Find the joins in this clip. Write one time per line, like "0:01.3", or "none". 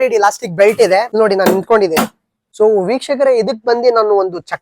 0:01.1
0:02.6